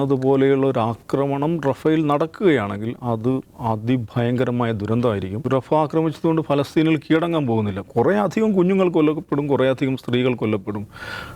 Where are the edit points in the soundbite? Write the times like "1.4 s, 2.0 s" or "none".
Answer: 5.4 s